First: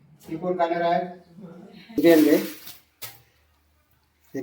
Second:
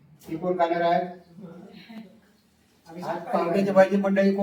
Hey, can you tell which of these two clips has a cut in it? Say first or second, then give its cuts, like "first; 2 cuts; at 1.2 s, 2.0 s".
first; 1 cut; at 2.0 s